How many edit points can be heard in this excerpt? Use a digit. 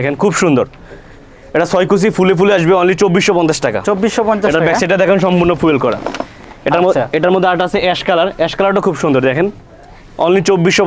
0